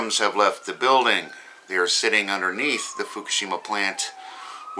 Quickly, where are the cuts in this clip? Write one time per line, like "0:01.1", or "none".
0:01.6